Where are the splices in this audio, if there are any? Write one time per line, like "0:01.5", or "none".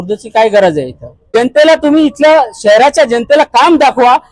0:01.1